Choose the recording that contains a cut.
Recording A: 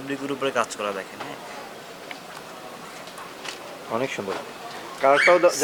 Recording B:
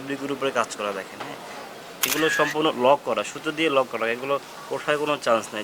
B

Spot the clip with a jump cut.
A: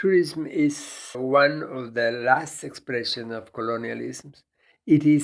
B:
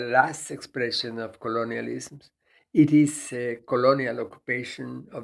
A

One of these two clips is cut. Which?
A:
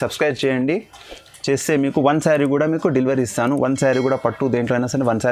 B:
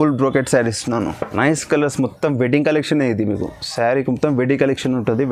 B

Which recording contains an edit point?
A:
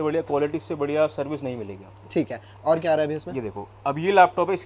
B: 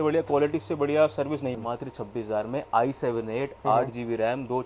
B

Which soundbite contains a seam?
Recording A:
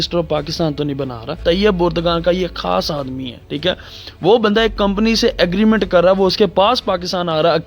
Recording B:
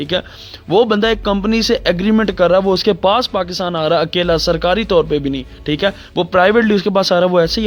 A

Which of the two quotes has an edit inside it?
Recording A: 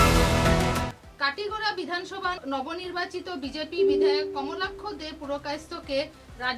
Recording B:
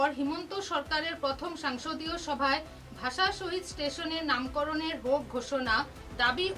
A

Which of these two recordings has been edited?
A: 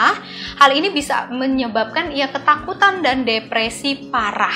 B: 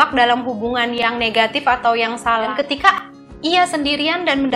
B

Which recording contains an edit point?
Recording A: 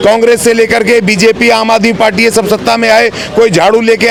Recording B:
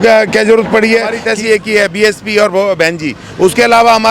B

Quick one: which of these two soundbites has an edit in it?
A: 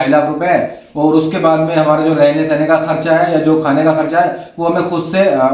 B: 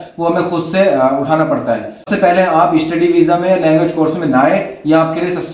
B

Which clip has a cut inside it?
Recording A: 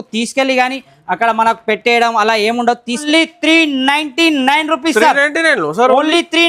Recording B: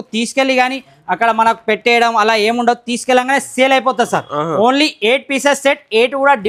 A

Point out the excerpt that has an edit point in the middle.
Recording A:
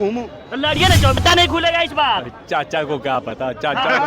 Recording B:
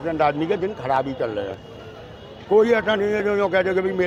A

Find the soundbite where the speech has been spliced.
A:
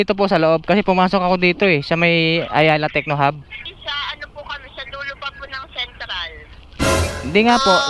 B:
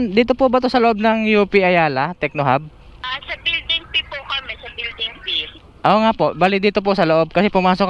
B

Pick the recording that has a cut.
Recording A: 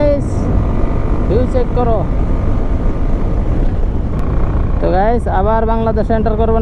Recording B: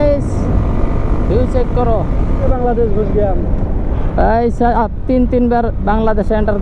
B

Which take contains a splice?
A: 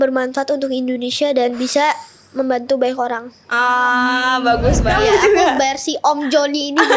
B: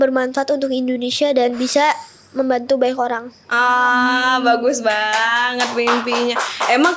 A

